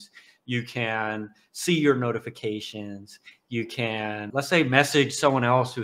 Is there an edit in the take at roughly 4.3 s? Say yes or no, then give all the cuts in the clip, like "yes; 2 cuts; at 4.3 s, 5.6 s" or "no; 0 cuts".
yes; 1 cut; at 4.3 s